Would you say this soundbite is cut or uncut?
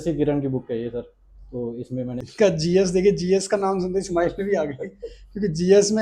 cut